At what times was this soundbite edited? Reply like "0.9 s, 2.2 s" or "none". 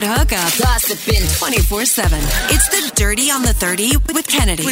none

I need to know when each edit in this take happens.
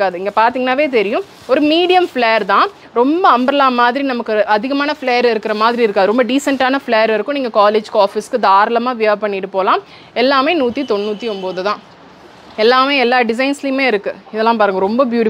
none

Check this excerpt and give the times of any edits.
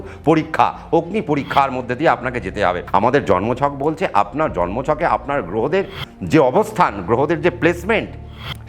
2.8 s

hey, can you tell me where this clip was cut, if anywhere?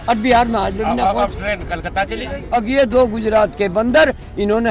2.4 s

